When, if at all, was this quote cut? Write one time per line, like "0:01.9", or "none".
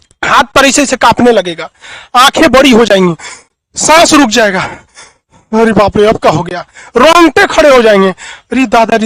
none